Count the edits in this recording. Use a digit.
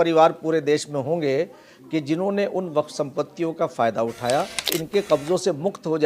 1